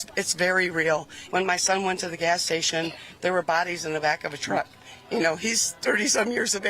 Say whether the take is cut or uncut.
cut